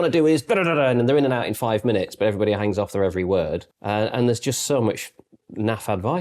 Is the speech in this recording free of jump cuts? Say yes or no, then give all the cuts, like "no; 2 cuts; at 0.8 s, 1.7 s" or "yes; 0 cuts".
no; 1 cut; at 3.7 s